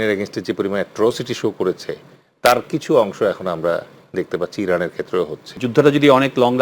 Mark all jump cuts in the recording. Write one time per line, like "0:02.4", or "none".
0:05.5